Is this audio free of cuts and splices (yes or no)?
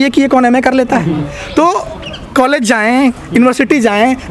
yes